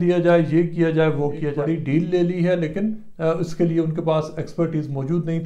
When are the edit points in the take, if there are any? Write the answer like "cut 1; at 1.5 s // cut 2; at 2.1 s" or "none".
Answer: cut 1; at 1.6 s

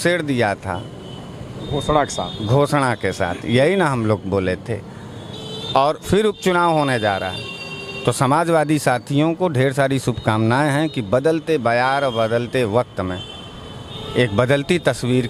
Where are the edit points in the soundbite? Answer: none

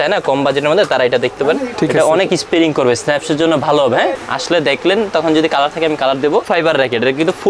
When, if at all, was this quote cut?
cut 1; at 1.7 s // cut 2; at 4.2 s // cut 3; at 6.5 s

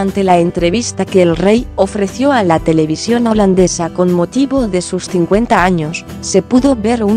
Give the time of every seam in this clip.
cut 1; at 1.4 s

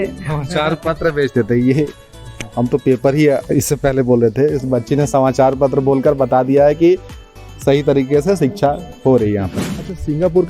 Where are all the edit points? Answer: cut 1; at 9.6 s

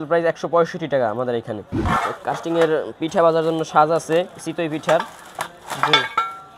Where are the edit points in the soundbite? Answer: cut 1; at 1.7 s // cut 2; at 4.4 s

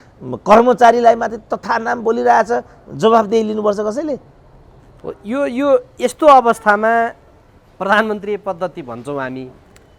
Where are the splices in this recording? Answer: none

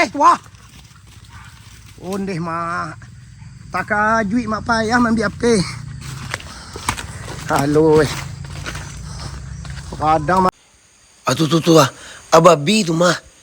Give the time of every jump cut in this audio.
cut 1; at 10.5 s

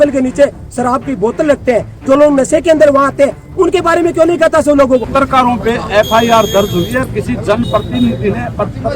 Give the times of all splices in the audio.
cut 1; at 5.1 s

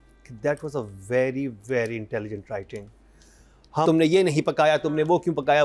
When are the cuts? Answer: cut 1; at 3.9 s

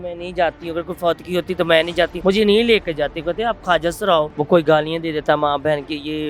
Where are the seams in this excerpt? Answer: cut 1; at 2.2 s // cut 2; at 4.3 s

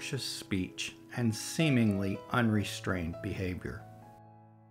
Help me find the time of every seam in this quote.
cut 1; at 3.8 s

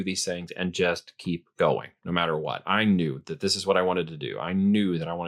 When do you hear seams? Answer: none

